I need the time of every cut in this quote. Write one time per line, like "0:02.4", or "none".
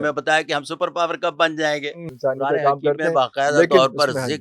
0:02.0